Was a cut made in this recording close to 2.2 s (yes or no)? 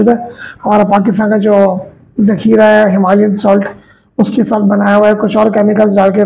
no